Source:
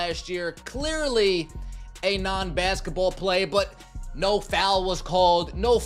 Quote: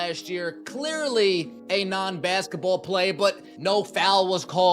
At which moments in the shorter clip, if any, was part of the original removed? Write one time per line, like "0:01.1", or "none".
0:01.6
0:03.5